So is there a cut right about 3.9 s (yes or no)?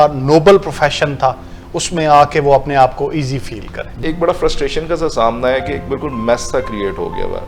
yes